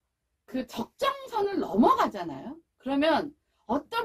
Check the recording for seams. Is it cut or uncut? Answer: uncut